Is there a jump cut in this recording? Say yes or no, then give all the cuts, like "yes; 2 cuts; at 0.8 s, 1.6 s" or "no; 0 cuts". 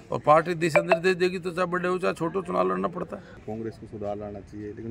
yes; 1 cut; at 3.4 s